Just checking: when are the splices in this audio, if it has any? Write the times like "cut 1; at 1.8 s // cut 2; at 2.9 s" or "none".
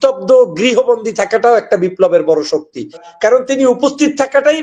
cut 1; at 3.0 s